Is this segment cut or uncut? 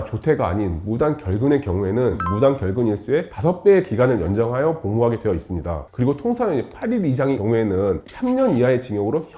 cut